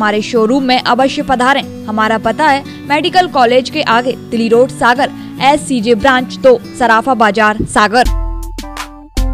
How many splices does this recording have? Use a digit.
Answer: 1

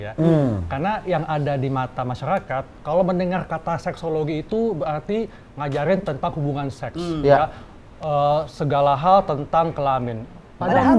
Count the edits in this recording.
0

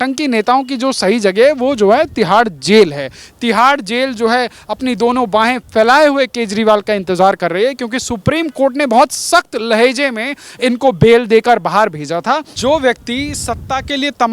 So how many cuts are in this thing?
1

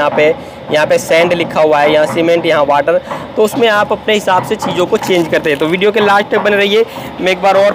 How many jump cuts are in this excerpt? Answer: 0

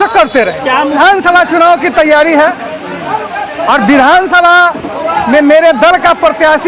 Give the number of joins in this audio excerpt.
1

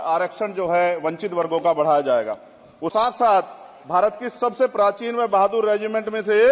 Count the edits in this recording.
1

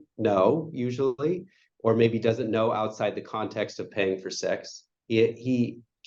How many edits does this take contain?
0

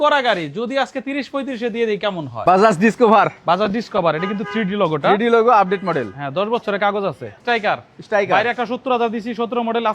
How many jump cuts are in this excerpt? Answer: 2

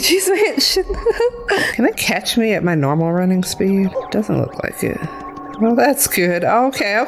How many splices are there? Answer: 2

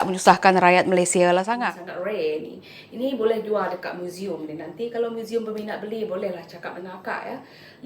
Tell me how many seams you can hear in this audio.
1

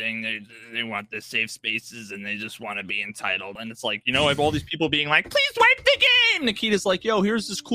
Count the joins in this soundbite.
1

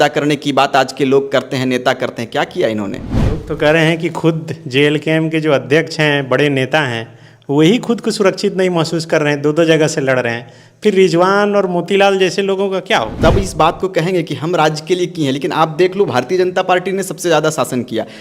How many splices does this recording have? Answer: 2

